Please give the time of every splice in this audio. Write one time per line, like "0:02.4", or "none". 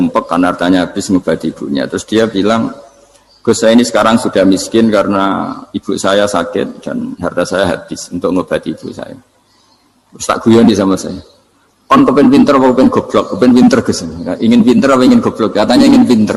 none